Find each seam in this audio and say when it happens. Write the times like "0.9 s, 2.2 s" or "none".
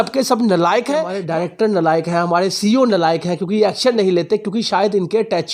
1.2 s